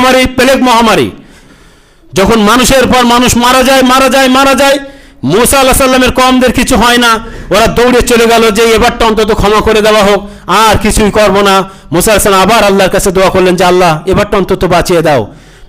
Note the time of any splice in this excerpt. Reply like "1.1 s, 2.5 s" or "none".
1.5 s

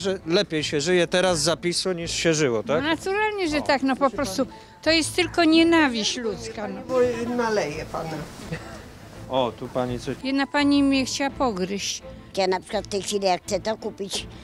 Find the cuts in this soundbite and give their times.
12.3 s

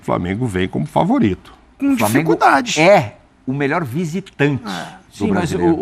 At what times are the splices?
1.7 s

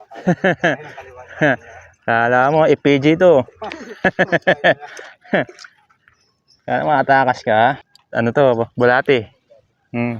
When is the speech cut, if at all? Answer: 7.9 s

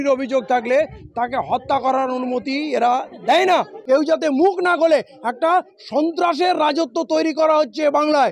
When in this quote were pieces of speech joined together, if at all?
3.8 s

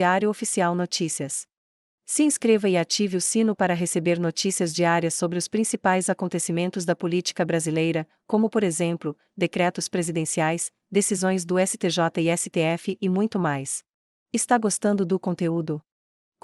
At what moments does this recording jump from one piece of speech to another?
13.9 s

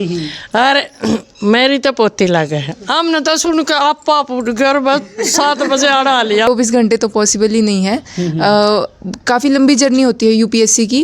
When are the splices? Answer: 6.5 s

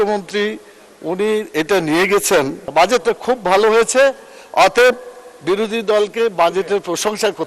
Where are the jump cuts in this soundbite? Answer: 2.7 s

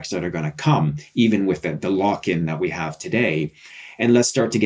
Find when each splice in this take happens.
none

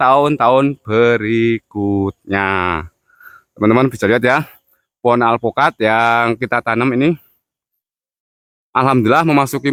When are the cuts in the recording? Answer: none

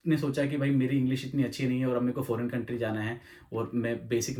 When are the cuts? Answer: none

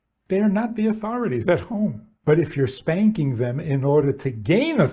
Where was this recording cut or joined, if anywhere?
2.1 s

